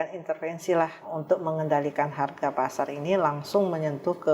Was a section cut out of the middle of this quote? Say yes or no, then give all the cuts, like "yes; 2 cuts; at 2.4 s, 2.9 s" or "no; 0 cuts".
yes; 1 cut; at 1.1 s